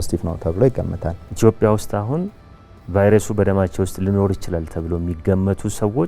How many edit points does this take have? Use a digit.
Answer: 1